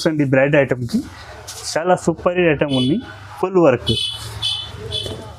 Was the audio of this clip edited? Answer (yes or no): no